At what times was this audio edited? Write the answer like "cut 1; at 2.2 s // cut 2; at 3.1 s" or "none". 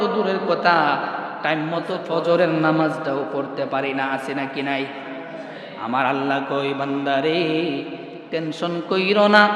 cut 1; at 2.0 s